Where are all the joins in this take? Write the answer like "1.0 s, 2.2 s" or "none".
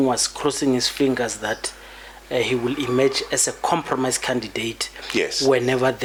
none